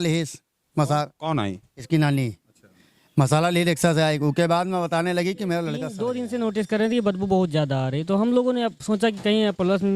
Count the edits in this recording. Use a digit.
1